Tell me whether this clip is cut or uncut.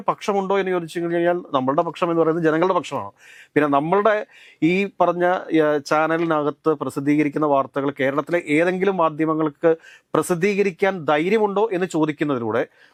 uncut